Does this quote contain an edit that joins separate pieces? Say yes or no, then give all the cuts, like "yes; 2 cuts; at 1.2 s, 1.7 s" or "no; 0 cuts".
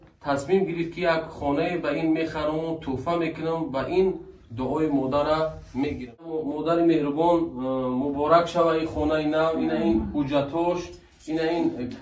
yes; 1 cut; at 6.3 s